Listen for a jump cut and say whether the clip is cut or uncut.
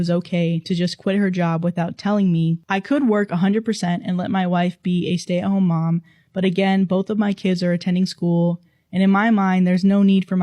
cut